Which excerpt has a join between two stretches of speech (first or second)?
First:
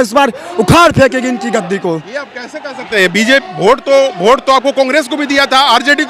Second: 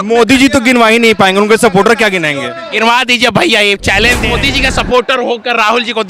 second